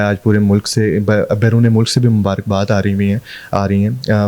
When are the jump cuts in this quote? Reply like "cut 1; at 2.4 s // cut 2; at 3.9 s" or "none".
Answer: none